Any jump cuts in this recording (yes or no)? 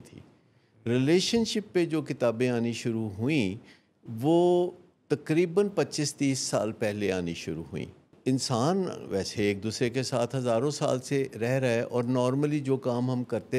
yes